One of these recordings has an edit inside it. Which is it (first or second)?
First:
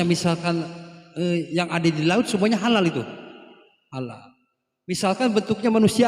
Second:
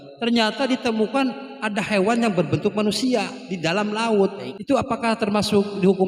second